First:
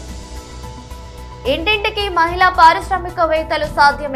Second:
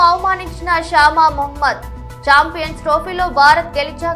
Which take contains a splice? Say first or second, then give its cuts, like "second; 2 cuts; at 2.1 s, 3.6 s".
first; 1 cut; at 1.1 s